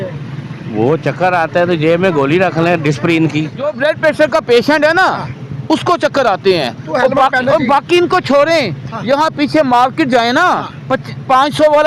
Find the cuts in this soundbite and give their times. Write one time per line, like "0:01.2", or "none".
0:03.7